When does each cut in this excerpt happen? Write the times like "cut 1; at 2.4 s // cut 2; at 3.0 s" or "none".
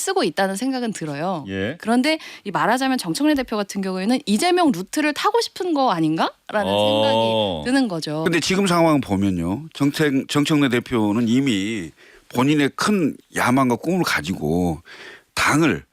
cut 1; at 8.2 s

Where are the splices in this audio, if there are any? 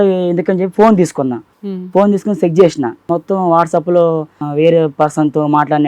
cut 1; at 1.5 s // cut 2; at 3.1 s // cut 3; at 4.4 s

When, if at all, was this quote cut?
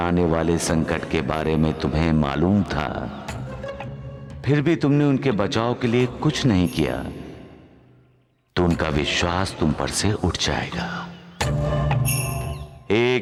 none

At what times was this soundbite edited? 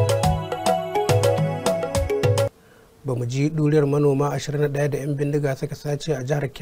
cut 1; at 2.7 s

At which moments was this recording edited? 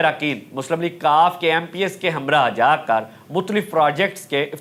none

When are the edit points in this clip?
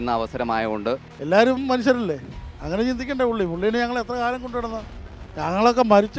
cut 1; at 1.1 s

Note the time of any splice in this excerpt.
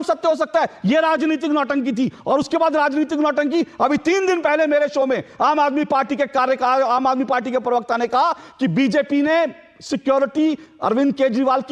none

